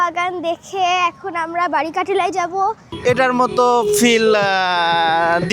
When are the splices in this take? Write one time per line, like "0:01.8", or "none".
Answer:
0:02.9